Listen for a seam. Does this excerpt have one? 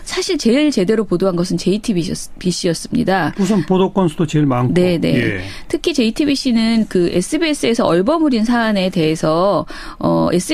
yes; 1 cut; at 4.5 s

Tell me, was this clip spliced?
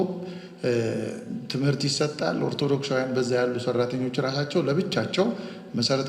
no; 0 cuts

